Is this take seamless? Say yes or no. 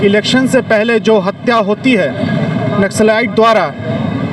yes